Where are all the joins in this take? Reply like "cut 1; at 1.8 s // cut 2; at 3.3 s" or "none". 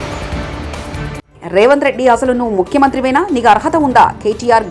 cut 1; at 1.3 s